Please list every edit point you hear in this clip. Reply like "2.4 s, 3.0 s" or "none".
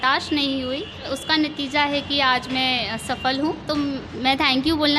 1.1 s, 4.1 s